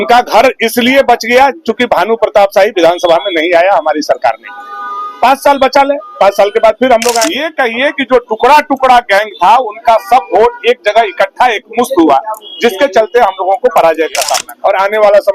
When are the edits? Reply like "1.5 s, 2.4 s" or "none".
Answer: 7.5 s, 14.4 s